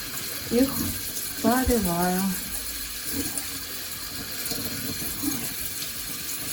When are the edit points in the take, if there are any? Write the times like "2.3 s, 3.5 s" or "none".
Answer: none

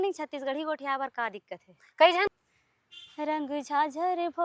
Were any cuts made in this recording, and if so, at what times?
2.3 s

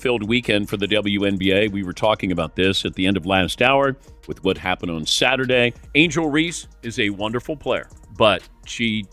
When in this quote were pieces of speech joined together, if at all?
5.8 s, 8.0 s

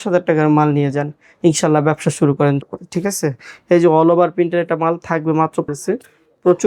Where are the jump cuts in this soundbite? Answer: 2.6 s, 5.7 s

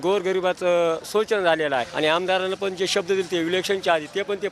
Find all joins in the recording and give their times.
1.9 s

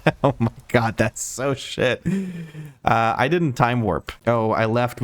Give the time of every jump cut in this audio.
4.1 s

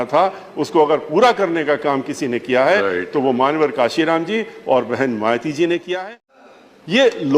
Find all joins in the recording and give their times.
6.0 s

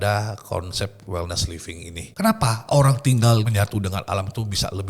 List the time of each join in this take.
2.0 s, 3.5 s

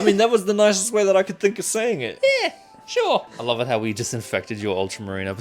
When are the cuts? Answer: 3.3 s

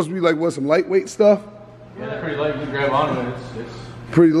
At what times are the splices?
none

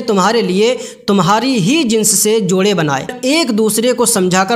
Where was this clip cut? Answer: 3.2 s

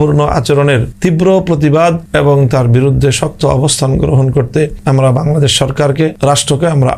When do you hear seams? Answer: 0.9 s, 2.0 s, 4.8 s, 6.2 s

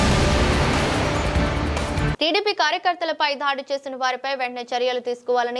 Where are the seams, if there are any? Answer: 2.1 s

